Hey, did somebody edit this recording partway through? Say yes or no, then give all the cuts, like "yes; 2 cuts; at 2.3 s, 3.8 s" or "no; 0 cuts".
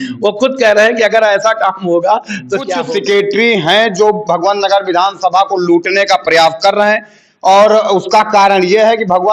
yes; 1 cut; at 2.8 s